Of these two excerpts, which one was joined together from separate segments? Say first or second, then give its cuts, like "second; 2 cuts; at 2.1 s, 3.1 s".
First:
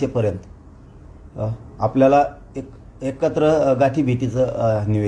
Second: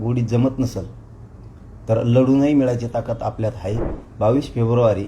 second; 1 cut; at 3.9 s